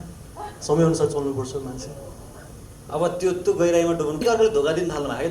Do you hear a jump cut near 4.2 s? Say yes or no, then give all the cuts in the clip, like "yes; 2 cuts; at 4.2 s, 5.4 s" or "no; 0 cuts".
yes; 1 cut; at 4.2 s